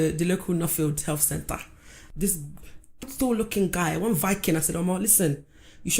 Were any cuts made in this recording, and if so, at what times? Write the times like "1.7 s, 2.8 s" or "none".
1.9 s